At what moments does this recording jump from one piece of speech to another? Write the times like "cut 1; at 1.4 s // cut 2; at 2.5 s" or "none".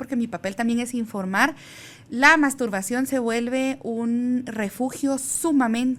none